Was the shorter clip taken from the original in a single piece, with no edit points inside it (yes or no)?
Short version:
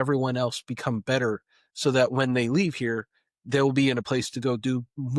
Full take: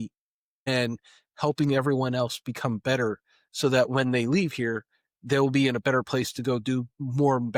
no